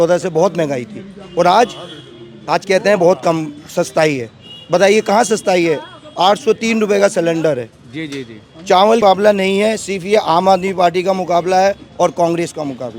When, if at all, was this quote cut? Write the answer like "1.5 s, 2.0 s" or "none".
9.0 s